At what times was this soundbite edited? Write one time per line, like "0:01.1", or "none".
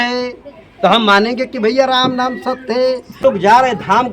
0:03.2